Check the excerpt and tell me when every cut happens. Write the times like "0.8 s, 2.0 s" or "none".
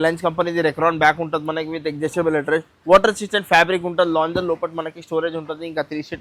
none